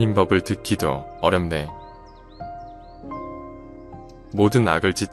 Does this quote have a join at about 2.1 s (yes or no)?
yes